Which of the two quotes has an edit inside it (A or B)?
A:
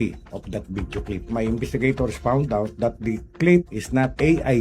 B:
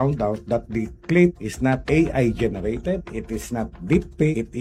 A